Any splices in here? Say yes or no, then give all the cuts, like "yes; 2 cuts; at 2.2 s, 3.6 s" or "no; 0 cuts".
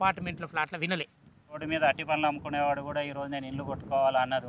yes; 1 cut; at 1.6 s